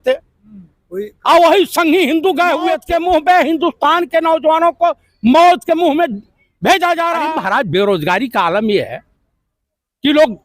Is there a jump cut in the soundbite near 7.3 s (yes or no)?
yes